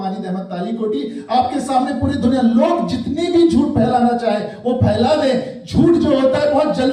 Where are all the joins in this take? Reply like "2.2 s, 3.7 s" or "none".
none